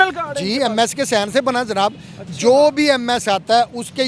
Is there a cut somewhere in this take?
no; 0 cuts

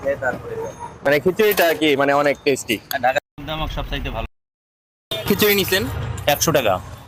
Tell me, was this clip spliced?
no; 0 cuts

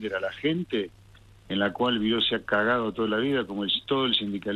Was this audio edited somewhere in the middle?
no; 0 cuts

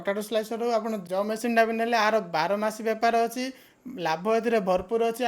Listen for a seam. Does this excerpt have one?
yes; 1 cut; at 1.0 s

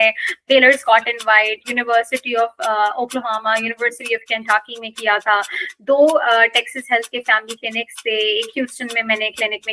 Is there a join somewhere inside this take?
no; 0 cuts

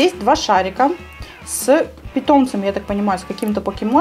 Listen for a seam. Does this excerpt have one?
no; 0 cuts

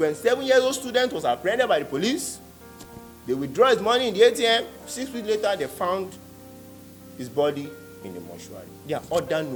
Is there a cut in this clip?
no; 0 cuts

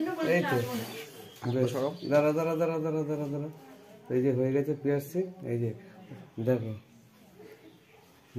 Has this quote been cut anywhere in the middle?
no; 0 cuts

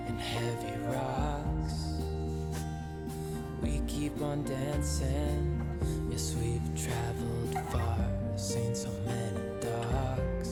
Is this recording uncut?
yes; 0 cuts

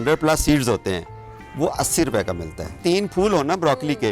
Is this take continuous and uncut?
no; 1 cut; at 2.8 s

